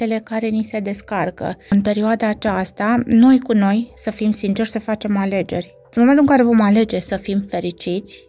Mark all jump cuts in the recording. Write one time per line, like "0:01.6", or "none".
0:01.7
0:05.8